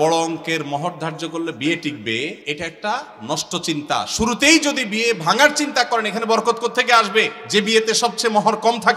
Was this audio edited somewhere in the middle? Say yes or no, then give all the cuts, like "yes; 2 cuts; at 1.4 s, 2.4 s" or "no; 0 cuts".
yes; 2 cuts; at 2.4 s, 7.4 s